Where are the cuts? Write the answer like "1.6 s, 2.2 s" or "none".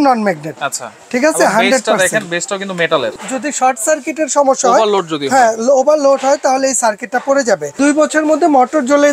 3.1 s, 7.8 s